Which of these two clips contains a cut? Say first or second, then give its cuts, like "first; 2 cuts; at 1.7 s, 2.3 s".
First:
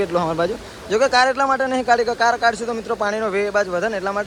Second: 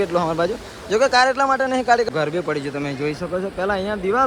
second; 1 cut; at 2.1 s